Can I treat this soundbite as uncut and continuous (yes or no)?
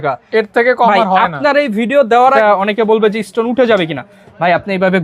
no